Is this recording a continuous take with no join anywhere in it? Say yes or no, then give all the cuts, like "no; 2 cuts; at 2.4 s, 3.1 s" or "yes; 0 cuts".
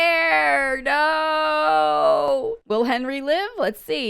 no; 1 cut; at 2.6 s